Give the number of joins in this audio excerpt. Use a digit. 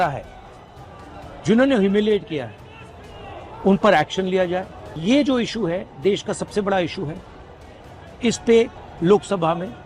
2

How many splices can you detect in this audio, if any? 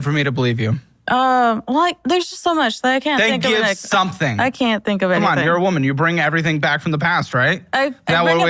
3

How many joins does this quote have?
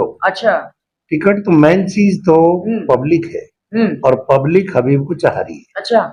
0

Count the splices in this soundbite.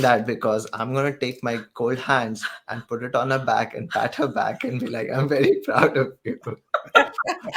0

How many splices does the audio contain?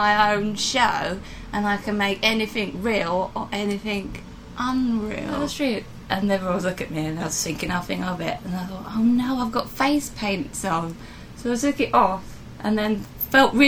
1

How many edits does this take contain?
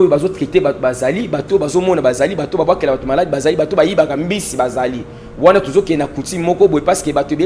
0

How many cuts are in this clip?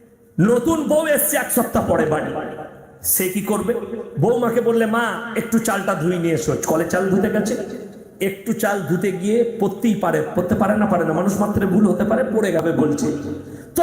1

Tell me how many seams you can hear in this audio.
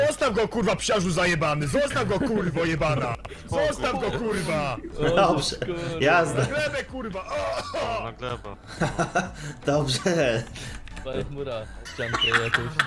1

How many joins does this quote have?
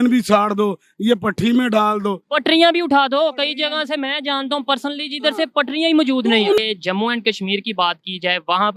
1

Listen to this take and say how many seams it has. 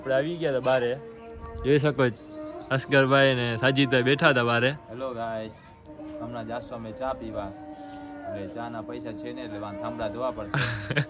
0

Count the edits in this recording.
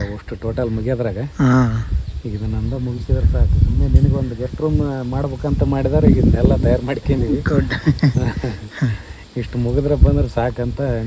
0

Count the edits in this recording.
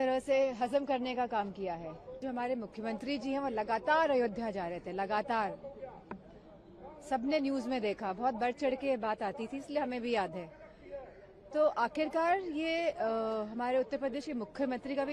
1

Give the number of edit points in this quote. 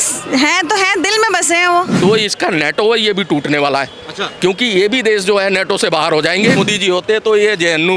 2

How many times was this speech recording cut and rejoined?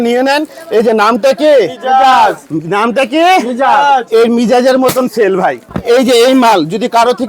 1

